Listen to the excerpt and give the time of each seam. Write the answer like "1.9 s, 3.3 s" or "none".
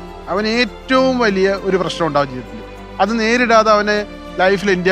none